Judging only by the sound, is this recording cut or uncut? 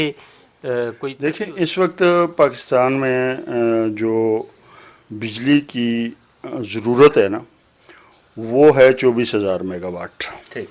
cut